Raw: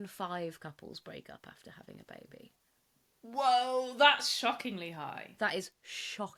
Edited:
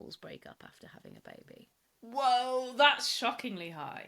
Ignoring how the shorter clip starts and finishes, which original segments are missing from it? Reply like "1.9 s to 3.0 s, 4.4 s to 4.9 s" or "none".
2.6 s to 3.0 s